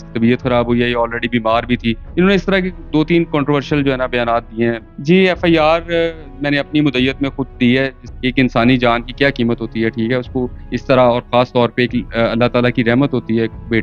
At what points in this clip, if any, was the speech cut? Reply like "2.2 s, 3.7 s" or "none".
2.0 s, 4.9 s, 8.0 s